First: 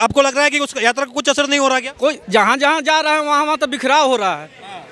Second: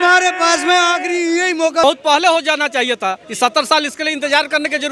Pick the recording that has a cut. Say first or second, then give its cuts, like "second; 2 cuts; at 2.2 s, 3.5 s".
second; 1 cut; at 1.8 s